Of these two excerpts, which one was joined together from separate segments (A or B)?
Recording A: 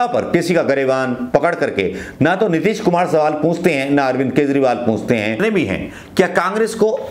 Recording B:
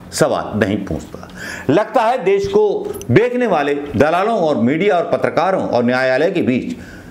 A